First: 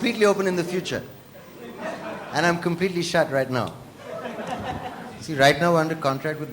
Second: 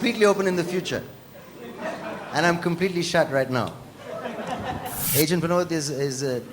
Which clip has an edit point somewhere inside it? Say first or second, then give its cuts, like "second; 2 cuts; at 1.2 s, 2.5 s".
second; 1 cut; at 5.0 s